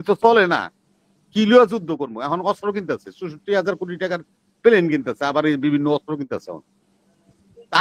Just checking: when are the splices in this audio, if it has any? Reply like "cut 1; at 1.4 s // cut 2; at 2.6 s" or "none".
none